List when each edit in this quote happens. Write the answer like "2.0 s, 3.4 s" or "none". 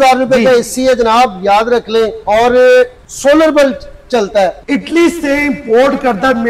2.2 s, 3.0 s, 4.6 s